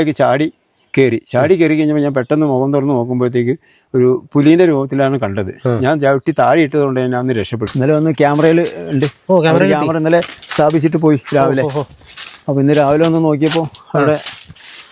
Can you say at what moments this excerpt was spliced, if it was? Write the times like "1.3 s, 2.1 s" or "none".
7.6 s